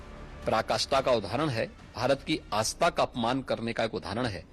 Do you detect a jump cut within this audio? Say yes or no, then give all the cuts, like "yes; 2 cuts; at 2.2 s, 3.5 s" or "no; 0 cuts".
no; 0 cuts